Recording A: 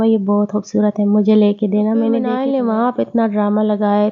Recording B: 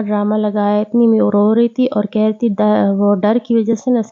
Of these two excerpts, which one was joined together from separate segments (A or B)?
A